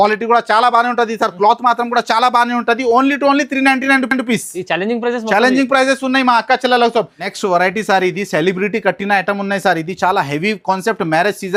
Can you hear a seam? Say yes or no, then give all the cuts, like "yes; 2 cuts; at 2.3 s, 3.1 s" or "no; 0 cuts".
no; 0 cuts